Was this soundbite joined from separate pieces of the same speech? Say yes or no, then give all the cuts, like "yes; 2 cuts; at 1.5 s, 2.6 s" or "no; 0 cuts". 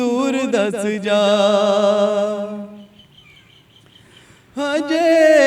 no; 0 cuts